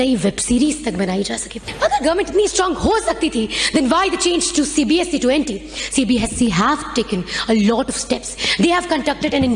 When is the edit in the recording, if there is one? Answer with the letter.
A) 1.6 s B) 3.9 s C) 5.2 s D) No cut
A